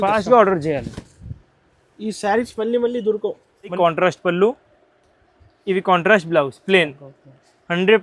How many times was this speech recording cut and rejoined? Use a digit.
1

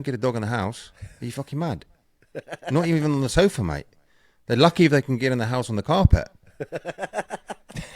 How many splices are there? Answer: 0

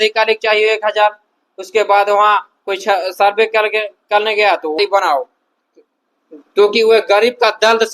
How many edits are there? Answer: 1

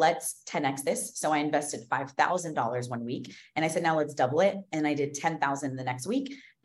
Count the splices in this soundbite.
0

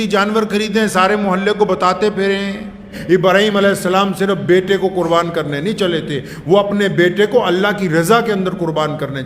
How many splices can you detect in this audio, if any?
1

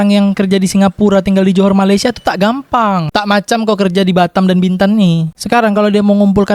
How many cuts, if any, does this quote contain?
1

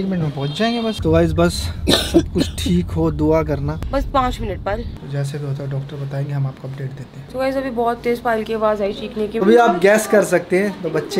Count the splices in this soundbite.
5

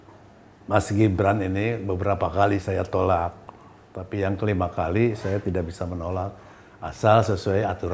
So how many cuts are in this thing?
0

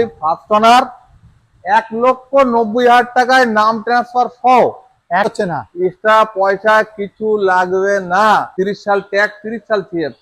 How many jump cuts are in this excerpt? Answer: 2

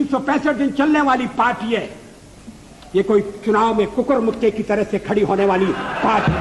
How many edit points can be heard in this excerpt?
0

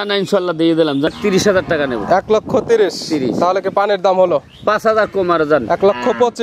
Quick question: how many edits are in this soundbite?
1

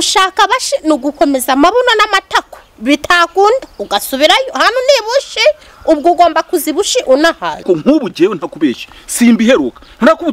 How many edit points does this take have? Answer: 1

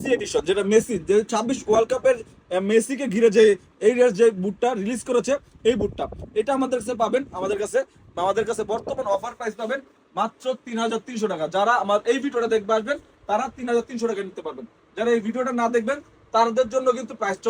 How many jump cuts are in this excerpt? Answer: 0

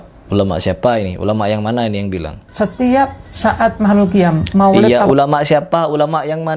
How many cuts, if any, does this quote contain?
0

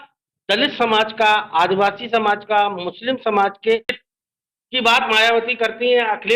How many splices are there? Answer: 1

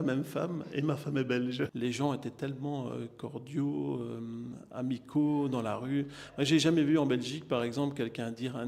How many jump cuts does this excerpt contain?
1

